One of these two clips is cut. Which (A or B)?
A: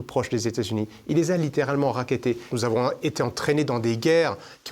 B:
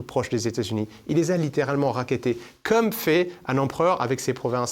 A